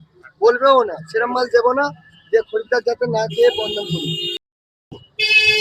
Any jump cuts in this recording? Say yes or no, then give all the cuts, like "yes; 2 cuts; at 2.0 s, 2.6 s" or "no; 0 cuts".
yes; 1 cut; at 4.4 s